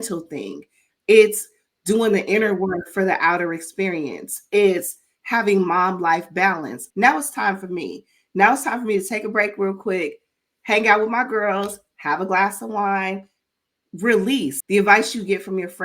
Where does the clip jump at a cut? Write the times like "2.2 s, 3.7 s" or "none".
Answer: 6.8 s, 14.6 s